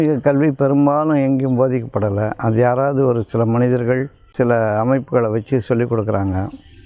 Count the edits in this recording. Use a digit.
1